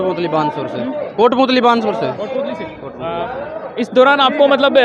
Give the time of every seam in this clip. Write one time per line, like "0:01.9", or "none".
none